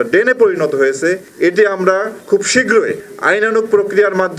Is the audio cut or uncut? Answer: cut